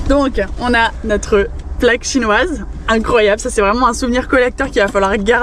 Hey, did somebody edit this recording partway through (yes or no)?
no